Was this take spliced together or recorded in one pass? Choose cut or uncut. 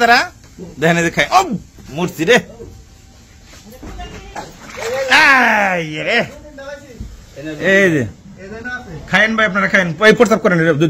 cut